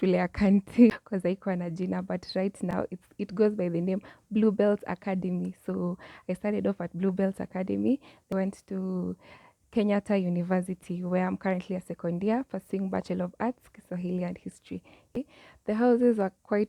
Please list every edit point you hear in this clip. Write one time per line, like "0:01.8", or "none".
0:00.9
0:08.3
0:15.2